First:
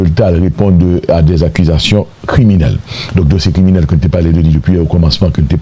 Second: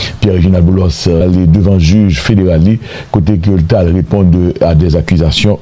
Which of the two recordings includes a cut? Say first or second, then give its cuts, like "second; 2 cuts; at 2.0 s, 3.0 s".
second; 1 cut; at 1.2 s